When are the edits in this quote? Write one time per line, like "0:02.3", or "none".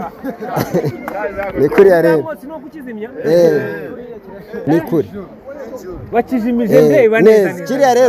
0:04.5